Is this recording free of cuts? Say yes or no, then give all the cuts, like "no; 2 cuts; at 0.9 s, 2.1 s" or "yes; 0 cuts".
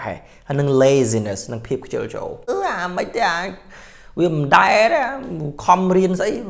no; 1 cut; at 2.5 s